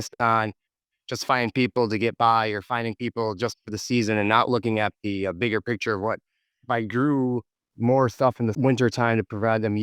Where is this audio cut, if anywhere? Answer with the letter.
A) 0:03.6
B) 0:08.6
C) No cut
B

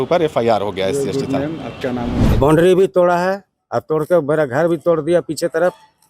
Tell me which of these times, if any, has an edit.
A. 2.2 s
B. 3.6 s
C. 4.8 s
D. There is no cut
A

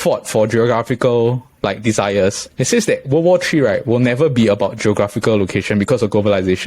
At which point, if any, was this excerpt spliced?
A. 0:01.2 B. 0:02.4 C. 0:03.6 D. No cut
B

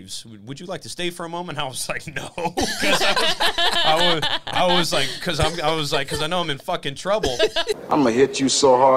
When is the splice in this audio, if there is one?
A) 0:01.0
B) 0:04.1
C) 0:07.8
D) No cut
C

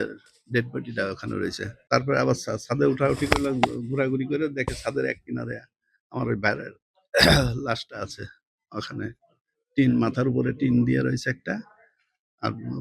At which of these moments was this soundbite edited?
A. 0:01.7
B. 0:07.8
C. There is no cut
A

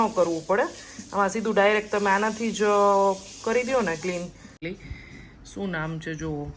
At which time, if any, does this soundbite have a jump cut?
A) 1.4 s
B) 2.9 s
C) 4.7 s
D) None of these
C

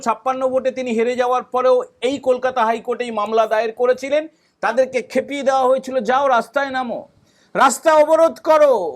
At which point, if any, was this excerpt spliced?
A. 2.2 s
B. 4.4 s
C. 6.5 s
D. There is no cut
B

